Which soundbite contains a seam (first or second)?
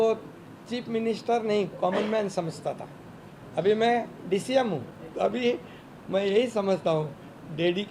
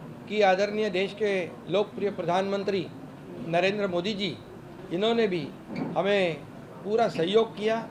first